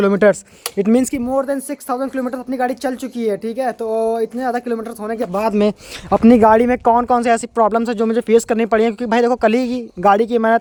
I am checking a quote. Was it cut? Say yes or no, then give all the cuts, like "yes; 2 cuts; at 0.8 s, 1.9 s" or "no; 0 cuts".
no; 0 cuts